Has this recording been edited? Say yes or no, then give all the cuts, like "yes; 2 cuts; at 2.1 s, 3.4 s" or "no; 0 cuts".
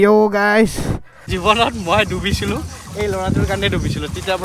yes; 1 cut; at 1.3 s